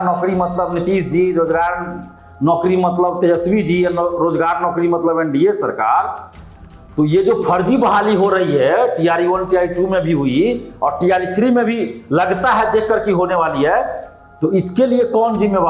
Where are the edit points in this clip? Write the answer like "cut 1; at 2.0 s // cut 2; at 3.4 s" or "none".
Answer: none